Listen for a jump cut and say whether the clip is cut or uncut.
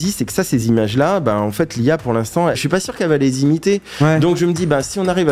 cut